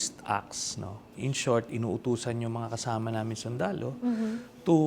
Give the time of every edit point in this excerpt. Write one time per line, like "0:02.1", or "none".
0:01.0